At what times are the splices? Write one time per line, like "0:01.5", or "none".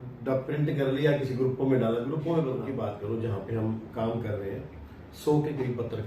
0:02.6